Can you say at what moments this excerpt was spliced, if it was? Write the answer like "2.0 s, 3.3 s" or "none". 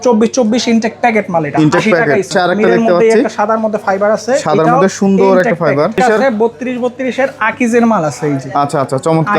2.3 s, 6.0 s